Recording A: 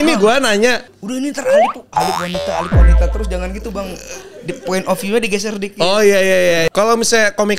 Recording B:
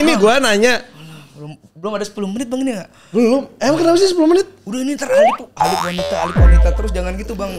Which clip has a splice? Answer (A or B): A